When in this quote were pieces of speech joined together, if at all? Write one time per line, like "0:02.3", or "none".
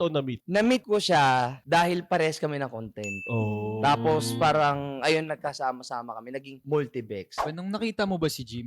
0:07.4

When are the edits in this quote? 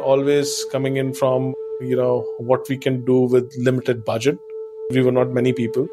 0:04.9

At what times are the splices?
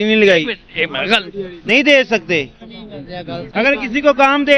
0:01.7

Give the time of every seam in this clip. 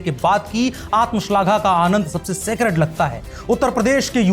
0:03.2

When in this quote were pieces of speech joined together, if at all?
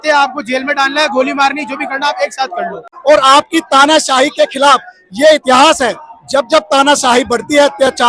0:02.9

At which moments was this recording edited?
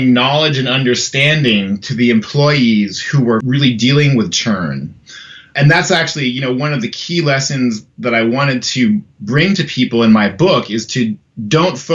0:03.4
0:05.5

